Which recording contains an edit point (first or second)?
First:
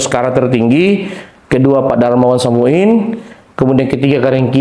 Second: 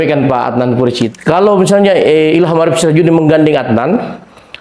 second